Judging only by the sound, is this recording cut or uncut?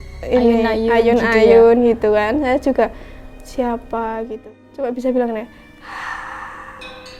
cut